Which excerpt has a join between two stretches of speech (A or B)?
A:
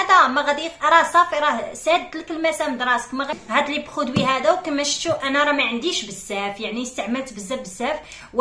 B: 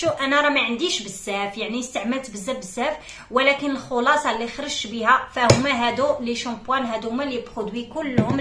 A